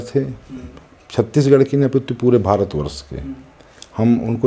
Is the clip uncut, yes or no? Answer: yes